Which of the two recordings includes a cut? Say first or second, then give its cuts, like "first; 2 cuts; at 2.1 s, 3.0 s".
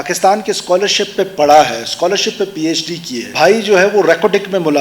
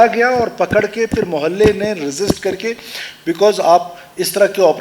first; 1 cut; at 3.2 s